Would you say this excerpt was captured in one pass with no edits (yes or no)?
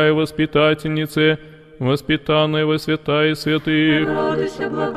no